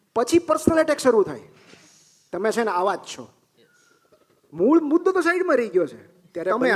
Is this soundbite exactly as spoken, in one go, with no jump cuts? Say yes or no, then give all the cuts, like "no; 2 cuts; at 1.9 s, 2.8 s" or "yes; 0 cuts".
yes; 0 cuts